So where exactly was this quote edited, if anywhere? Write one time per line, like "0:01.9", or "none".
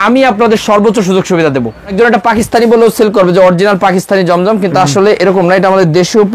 0:01.9